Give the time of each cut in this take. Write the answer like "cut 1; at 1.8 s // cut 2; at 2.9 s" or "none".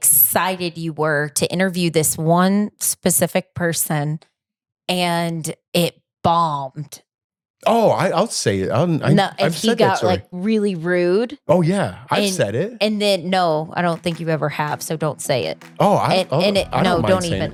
none